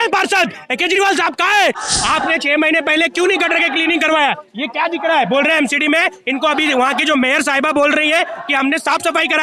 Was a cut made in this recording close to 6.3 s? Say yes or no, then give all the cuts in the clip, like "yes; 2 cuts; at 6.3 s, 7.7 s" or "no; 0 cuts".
no; 1 cut; at 1.9 s